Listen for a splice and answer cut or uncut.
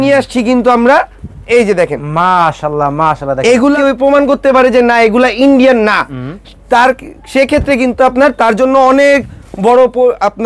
cut